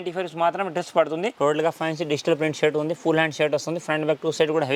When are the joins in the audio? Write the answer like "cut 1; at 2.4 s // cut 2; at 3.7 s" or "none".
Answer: cut 1; at 1.3 s